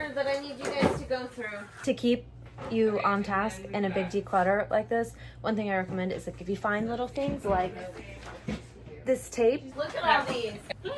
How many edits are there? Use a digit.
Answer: 2